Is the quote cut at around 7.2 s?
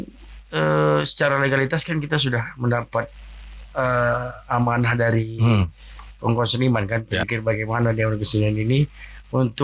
yes; 1 cut; at 7.2 s

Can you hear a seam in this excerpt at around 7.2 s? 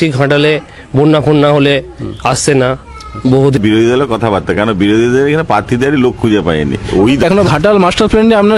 yes; 2 cuts; at 3.6 s, 7.2 s

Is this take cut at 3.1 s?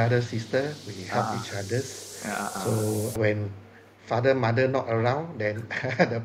yes; 1 cut; at 3.1 s

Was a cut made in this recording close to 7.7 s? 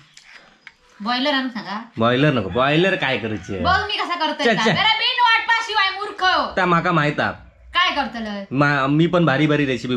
no; 0 cuts

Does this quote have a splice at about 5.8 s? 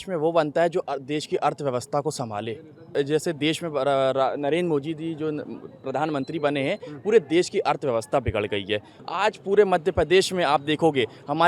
no; 2 cuts; at 2.9 s, 8.9 s

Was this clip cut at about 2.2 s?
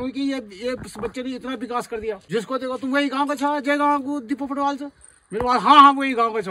yes; 1 cut; at 2.2 s

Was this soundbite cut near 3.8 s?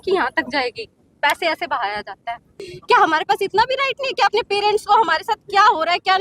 no; 1 cut; at 2.6 s

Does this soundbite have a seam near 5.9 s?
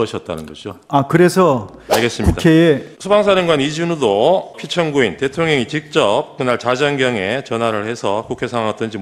no; 2 cuts; at 2.9 s, 4.6 s

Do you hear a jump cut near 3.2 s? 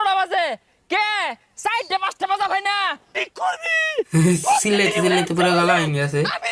yes; 1 cut; at 3.2 s

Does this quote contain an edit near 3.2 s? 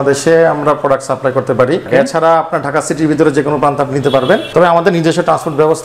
no; 2 cuts; at 1.9 s, 4.5 s

